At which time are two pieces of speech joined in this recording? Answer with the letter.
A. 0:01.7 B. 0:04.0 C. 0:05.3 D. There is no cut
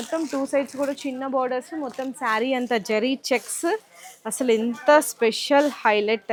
D